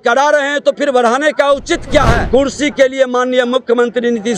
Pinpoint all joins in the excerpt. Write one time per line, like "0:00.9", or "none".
0:02.2